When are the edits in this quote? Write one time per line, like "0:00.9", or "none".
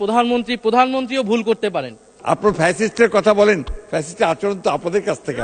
0:02.1